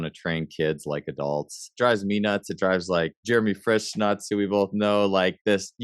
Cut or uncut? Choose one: cut